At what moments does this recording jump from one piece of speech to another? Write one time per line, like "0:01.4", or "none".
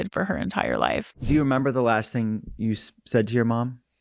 0:01.2